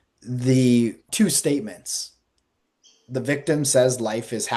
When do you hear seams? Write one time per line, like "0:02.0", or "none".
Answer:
0:01.0

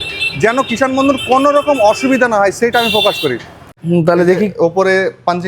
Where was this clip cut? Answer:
0:03.6

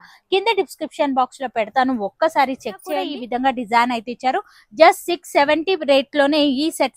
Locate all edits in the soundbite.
0:03.0

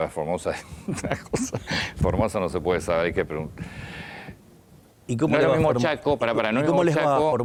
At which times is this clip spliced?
none

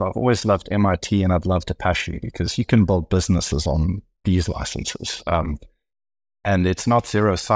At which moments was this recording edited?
none

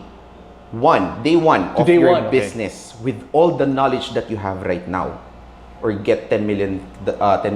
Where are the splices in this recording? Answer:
none

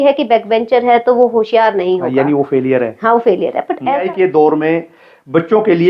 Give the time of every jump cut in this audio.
0:04.0

